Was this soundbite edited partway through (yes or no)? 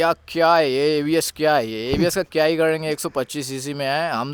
no